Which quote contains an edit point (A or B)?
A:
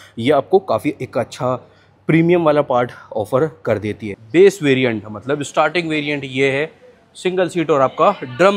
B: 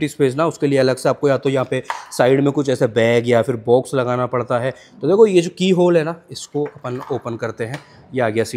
A